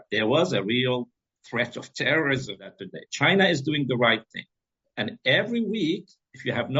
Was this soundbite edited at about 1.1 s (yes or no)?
no